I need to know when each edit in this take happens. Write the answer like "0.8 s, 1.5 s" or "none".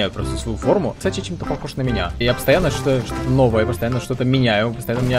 1.0 s, 2.2 s